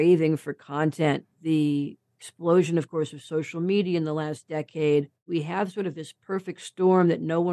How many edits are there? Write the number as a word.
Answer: one